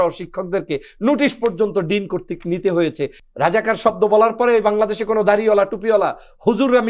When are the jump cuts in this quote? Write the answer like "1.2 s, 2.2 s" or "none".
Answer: 3.2 s